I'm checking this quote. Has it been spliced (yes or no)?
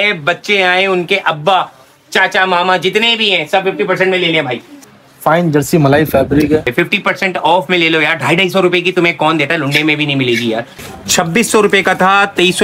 yes